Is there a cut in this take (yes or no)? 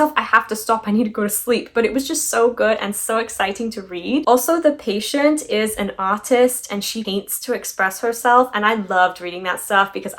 no